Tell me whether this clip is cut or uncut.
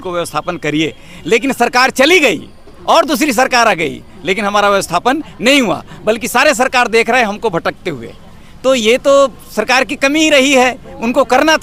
uncut